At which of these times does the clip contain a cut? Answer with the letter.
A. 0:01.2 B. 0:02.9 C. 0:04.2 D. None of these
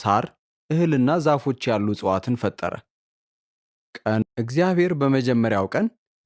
C